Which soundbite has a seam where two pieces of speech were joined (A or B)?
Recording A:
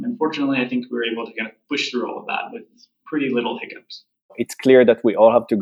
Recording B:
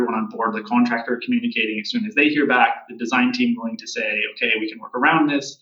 A